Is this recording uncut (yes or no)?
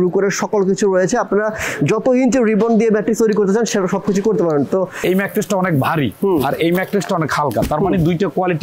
no